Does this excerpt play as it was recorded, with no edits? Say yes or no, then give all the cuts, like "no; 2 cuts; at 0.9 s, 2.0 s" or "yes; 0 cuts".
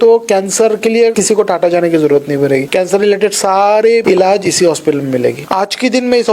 no; 4 cuts; at 1.2 s, 2.7 s, 4.0 s, 5.4 s